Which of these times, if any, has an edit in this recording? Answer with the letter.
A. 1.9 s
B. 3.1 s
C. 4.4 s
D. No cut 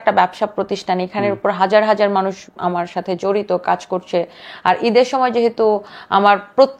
D